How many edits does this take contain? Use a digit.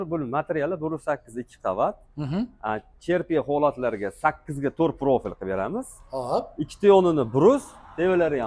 0